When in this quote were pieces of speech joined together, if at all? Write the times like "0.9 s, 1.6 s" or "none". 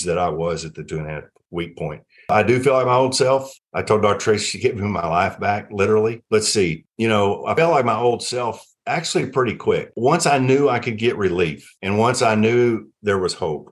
2.1 s